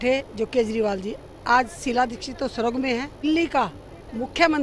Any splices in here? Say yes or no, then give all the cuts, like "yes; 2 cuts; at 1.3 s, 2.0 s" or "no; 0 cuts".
yes; 1 cut; at 3.2 s